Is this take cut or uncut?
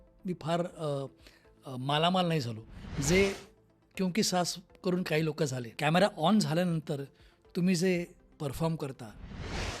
cut